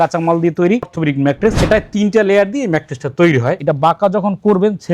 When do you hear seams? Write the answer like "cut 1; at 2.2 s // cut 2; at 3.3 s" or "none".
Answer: cut 1; at 3.6 s